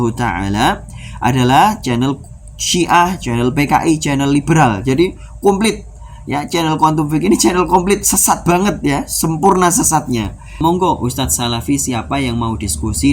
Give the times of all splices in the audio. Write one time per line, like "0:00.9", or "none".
0:10.6